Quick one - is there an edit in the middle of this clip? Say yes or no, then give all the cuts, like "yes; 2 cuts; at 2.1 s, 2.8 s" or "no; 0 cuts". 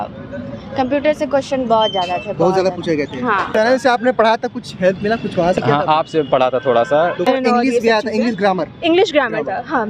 yes; 2 cuts; at 3.5 s, 7.3 s